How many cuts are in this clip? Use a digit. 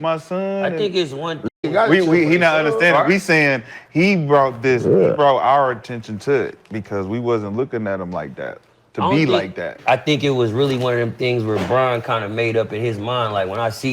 1